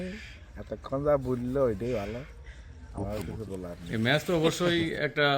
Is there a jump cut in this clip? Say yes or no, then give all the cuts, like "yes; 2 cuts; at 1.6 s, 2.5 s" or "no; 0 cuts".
yes; 1 cut; at 3.8 s